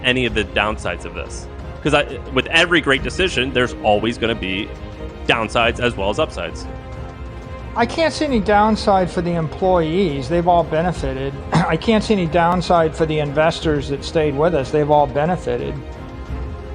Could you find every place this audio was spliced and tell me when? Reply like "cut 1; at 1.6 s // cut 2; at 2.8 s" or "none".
cut 1; at 15.8 s